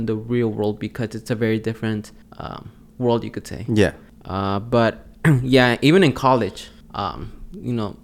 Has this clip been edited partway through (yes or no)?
no